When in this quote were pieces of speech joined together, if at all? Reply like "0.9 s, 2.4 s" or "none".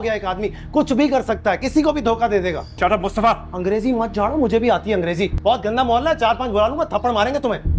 2.7 s, 5.3 s